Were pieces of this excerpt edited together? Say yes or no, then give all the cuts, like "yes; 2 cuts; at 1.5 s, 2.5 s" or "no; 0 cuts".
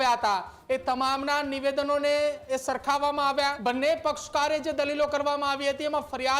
yes; 1 cut; at 3.6 s